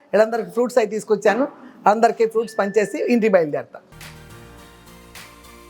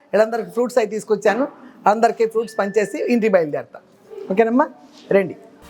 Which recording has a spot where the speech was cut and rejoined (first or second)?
first